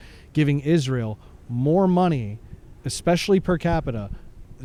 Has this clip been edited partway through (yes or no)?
no